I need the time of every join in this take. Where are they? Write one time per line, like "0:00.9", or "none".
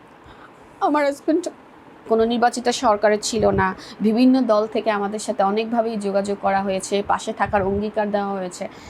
0:02.0

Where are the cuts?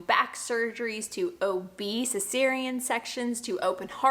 none

